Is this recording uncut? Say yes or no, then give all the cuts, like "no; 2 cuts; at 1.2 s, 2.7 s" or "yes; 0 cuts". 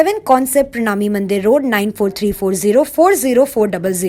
yes; 0 cuts